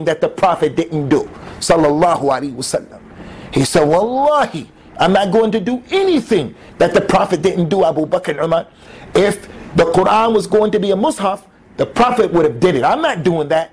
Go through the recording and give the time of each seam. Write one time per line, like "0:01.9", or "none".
none

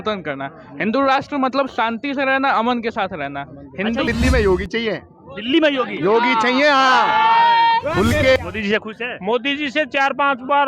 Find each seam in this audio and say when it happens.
0:04.1
0:08.4

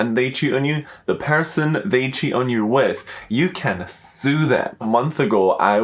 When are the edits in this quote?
0:04.8

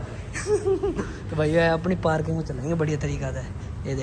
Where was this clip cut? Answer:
none

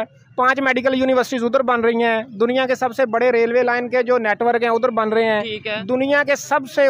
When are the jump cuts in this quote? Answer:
none

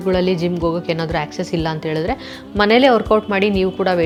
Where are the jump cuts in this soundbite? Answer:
none

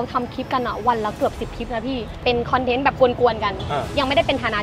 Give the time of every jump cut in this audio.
0:02.1

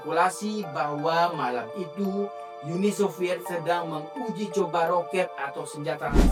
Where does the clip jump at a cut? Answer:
none

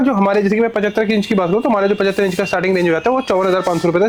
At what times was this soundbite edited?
none

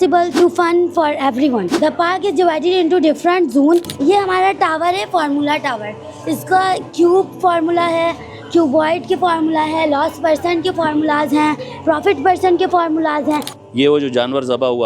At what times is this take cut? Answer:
0:03.9
0:13.6

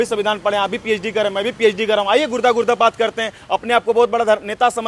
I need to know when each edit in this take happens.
none

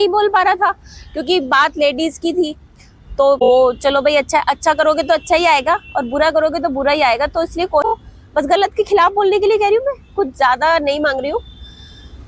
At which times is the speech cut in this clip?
0:03.5
0:07.9

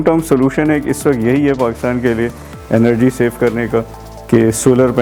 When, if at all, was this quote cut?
none

